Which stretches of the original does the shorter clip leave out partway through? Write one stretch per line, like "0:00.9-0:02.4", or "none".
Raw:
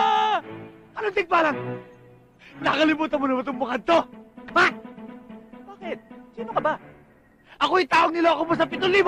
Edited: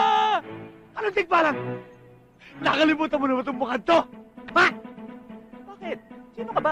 none